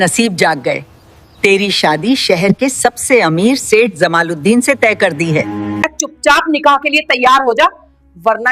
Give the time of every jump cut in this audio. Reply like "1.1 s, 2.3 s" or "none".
5.6 s